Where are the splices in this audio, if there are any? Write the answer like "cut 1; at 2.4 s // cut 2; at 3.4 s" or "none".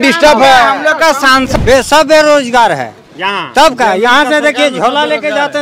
cut 1; at 1.5 s